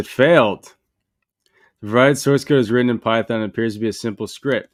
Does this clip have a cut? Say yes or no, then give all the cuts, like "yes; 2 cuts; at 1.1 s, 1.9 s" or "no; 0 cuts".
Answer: no; 0 cuts